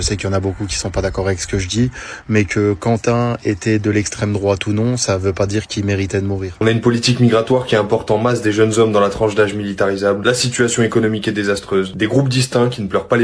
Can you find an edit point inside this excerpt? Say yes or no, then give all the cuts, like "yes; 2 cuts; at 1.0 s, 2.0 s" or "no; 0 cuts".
yes; 1 cut; at 6.5 s